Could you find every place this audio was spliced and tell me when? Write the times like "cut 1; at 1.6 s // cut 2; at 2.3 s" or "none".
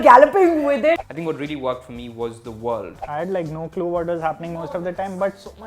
cut 1; at 0.9 s // cut 2; at 3.0 s